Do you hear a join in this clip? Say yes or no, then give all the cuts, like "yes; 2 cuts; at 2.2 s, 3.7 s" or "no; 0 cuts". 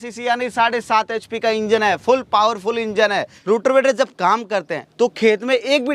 yes; 1 cut; at 3.3 s